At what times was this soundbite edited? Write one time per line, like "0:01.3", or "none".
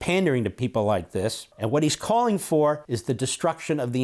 0:01.5
0:02.9